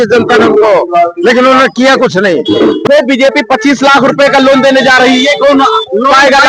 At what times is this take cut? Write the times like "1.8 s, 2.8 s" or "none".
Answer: 2.8 s